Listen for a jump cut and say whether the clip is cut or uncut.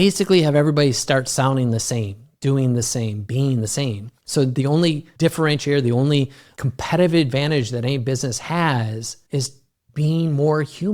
cut